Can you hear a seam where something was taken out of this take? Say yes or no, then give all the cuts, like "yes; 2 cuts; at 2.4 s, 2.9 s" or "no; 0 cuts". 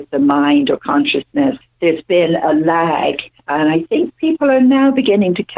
yes; 1 cut; at 1.7 s